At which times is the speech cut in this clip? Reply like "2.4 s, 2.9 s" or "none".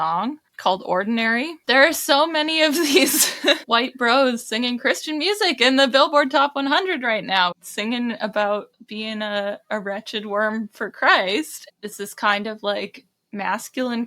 1.6 s, 7.6 s, 11.6 s